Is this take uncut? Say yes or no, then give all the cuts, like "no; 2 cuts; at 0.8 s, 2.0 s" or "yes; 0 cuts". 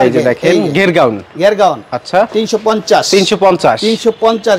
yes; 0 cuts